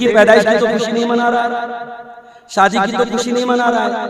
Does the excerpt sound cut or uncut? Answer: uncut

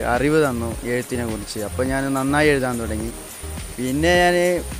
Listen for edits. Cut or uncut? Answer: uncut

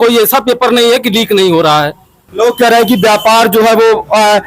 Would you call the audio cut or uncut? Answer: cut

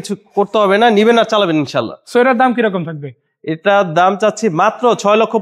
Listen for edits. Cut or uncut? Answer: uncut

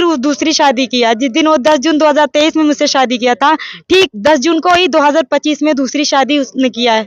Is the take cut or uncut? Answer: uncut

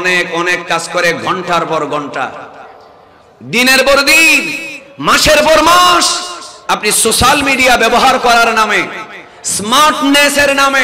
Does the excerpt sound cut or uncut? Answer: uncut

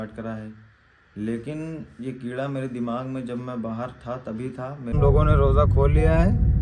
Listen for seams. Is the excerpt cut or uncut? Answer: cut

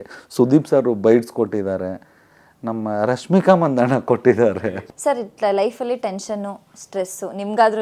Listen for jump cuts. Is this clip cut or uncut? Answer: cut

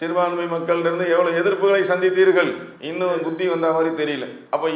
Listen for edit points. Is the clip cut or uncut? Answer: uncut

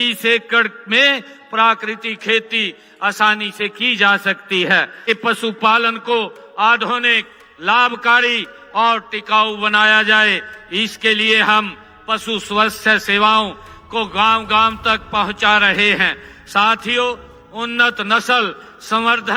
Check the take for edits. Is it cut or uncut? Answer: cut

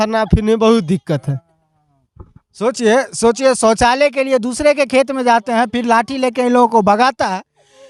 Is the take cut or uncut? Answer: uncut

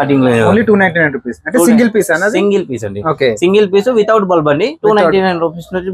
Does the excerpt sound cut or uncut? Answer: uncut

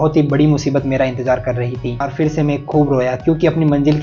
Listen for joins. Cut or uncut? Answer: cut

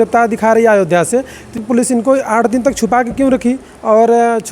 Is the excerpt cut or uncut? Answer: cut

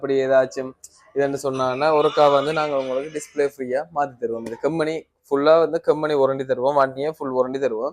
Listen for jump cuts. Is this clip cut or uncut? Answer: uncut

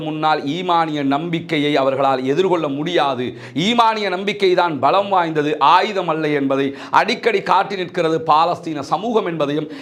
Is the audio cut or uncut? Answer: uncut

